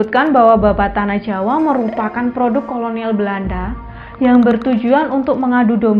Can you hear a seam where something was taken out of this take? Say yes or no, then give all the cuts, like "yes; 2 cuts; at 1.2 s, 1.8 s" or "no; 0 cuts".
no; 0 cuts